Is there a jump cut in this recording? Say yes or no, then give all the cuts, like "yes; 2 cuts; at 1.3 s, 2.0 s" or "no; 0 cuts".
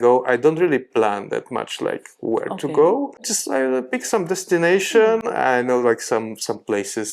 yes; 1 cut; at 3.3 s